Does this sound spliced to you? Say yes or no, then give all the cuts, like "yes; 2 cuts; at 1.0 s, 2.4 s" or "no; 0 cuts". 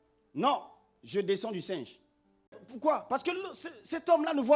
yes; 1 cut; at 2.6 s